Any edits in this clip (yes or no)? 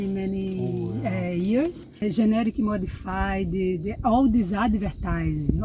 yes